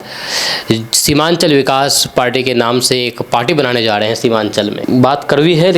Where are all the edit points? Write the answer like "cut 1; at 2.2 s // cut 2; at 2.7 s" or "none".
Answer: cut 1; at 4.8 s